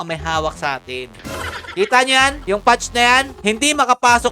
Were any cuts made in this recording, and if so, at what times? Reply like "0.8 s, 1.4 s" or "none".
1.2 s, 2.4 s, 3.3 s